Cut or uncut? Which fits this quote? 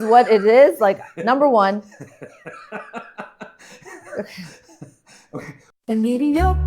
cut